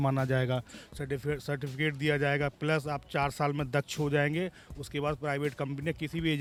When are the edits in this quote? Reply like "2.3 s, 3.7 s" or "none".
none